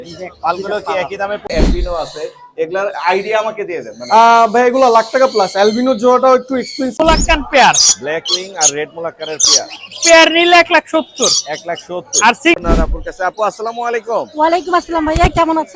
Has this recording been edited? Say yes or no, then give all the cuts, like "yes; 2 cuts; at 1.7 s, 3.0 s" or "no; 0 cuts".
yes; 3 cuts; at 1.5 s, 7.0 s, 12.6 s